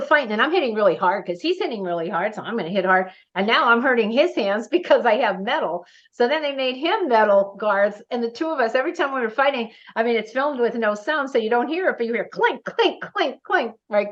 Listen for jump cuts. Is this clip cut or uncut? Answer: uncut